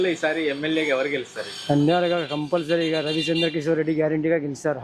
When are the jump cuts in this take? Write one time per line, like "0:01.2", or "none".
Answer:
none